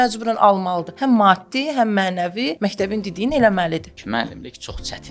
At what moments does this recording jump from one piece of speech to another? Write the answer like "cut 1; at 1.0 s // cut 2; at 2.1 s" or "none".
cut 1; at 0.9 s // cut 2; at 2.5 s // cut 3; at 3.9 s